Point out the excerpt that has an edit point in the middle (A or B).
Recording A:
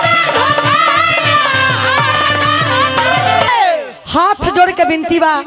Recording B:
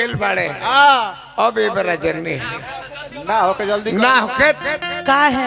A